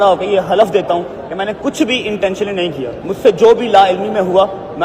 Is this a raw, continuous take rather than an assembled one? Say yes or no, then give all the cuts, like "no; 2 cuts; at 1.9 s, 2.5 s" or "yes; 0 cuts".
no; 1 cut; at 3.0 s